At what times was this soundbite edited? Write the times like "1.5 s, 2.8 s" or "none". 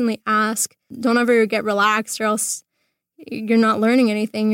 0.9 s